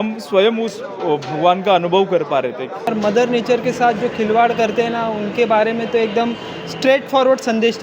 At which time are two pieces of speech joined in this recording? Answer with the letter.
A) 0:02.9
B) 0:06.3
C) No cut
A